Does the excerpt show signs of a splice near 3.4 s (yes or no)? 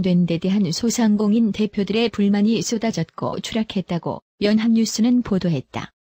no